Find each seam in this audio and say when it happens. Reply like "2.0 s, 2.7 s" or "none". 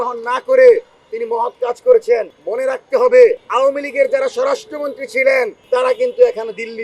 5.6 s